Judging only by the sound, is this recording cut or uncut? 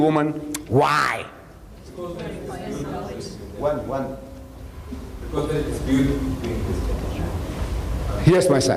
uncut